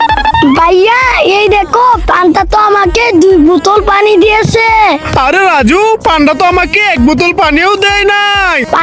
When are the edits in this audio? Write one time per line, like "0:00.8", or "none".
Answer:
none